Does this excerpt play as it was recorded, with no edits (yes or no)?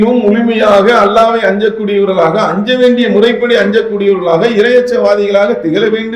yes